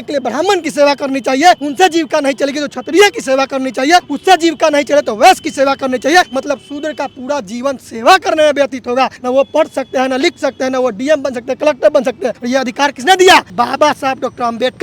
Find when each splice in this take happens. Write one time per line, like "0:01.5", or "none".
0:01.7
0:04.1
0:06.3
0:09.2
0:12.3
0:13.5